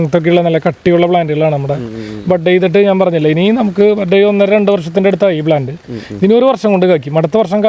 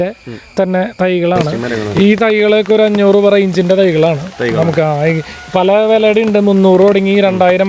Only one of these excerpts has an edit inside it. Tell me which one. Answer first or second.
second